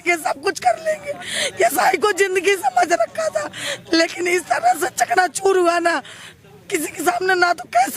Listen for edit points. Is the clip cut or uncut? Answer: uncut